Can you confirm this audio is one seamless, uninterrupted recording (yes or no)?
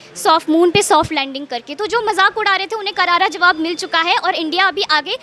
yes